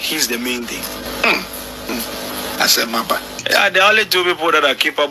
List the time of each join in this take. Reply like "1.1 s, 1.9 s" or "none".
1.1 s, 1.9 s, 3.4 s